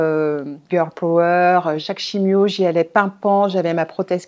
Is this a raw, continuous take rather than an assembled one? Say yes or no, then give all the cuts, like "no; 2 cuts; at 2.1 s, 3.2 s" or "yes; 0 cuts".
no; 1 cut; at 1.9 s